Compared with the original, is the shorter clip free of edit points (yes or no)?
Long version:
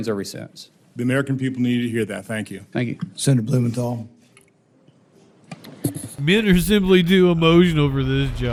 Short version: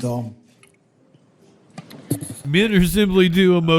yes